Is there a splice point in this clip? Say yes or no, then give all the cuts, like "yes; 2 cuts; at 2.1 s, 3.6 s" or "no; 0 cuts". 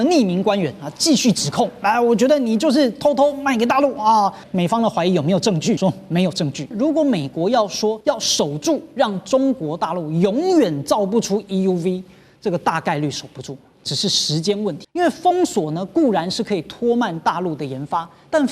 yes; 5 cuts; at 4.5 s, 5.8 s, 6.7 s, 8.0 s, 14.8 s